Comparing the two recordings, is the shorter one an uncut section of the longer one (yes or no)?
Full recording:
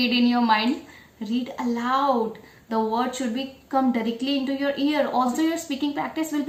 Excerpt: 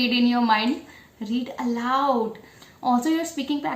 no